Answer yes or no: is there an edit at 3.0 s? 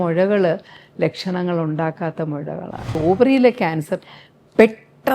yes